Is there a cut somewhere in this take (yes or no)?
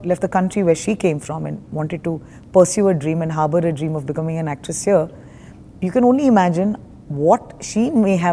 no